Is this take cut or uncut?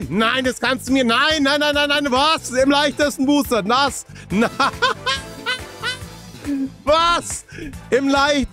uncut